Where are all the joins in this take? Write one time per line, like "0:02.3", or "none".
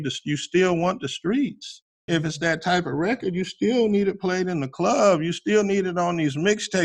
0:02.0